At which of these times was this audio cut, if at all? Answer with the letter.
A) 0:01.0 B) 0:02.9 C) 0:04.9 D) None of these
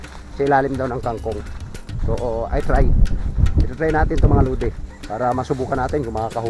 C